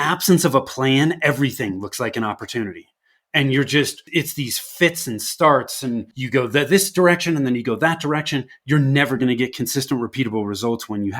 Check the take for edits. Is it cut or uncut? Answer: cut